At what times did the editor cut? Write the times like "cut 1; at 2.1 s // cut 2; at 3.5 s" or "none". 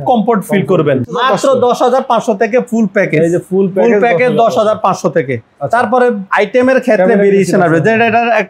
cut 1; at 1.2 s // cut 2; at 6.2 s